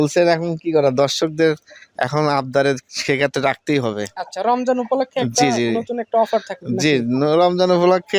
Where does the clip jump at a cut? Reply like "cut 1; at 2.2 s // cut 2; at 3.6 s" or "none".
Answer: none